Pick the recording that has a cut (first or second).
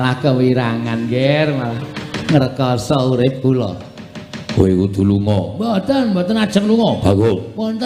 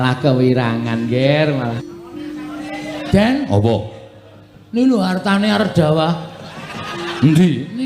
second